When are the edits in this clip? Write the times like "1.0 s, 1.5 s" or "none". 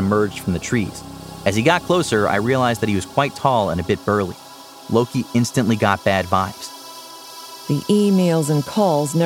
7.1 s